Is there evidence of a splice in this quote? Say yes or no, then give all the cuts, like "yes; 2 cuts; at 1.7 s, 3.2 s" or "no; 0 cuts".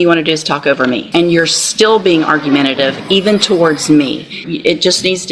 yes; 2 cuts; at 1.1 s, 4.4 s